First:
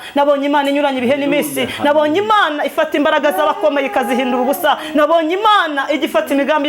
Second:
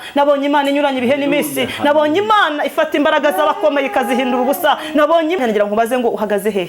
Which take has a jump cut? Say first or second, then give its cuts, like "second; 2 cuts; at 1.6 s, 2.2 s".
second; 1 cut; at 5.4 s